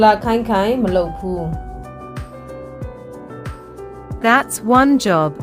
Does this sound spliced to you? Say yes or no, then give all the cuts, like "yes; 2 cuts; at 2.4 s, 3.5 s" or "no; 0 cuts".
yes; 2 cuts; at 1.7 s, 3.5 s